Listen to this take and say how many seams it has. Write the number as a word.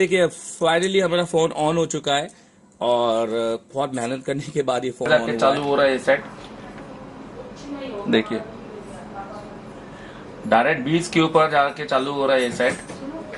one